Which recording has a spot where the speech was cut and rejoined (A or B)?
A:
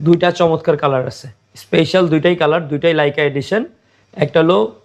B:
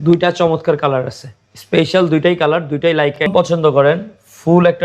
B